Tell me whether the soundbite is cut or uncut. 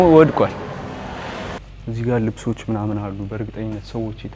cut